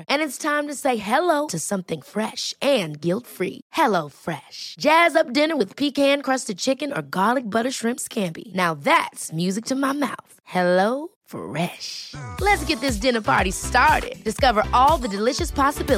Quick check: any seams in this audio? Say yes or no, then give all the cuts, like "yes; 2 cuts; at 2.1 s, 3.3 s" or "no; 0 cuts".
no; 0 cuts